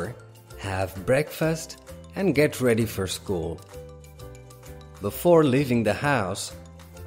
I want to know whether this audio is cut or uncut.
cut